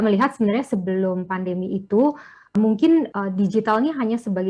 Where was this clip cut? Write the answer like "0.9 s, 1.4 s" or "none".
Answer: 2.5 s, 3.1 s